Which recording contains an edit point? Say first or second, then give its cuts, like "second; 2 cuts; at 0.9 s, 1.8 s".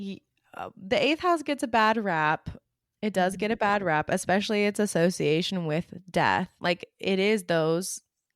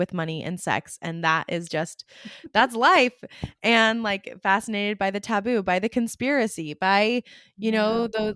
first; 1 cut; at 6.5 s